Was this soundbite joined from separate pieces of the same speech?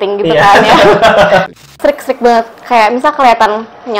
yes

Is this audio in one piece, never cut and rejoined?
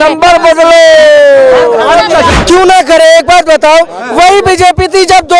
no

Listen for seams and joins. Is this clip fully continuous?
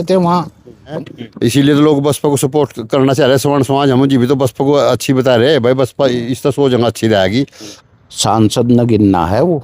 no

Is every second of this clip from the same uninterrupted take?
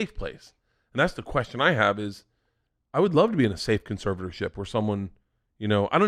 yes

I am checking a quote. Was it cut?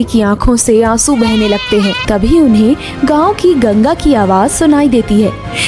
yes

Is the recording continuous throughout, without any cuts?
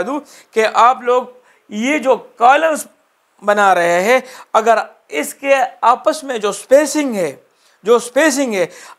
yes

